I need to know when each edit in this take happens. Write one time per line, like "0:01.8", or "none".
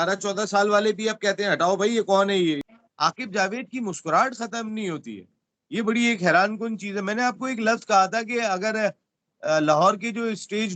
0:02.6

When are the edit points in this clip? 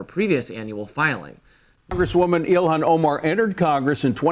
0:01.9

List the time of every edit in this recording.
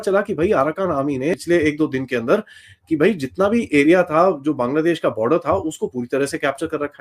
0:01.4

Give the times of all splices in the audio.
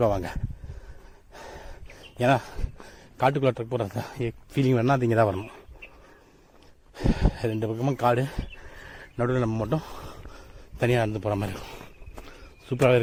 none

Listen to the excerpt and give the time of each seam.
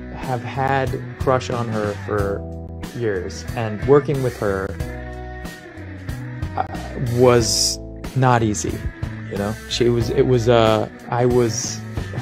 0:01.2

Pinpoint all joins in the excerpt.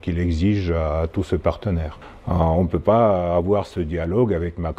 0:02.0

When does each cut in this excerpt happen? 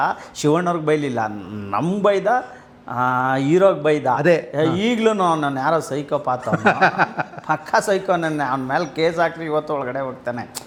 none

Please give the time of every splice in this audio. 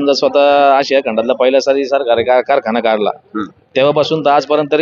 none

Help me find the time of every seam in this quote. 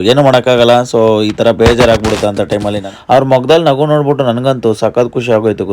0:02.9

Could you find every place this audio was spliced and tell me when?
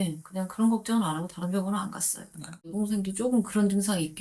0:02.7

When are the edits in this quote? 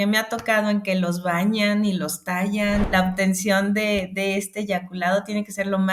0:02.8

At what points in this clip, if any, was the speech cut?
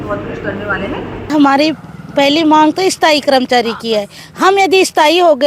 0:01.3

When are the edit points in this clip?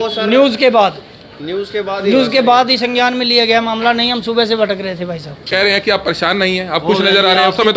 0:05.5

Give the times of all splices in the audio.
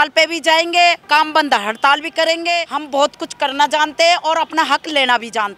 0:01.0
0:02.7

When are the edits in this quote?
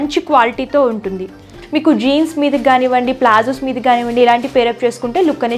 0:01.6

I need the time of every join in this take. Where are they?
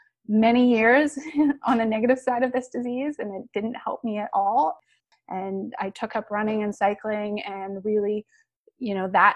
0:04.9

